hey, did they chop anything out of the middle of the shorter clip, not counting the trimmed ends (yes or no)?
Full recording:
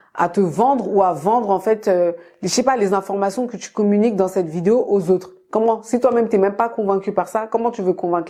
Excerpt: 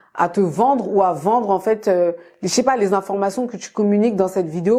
no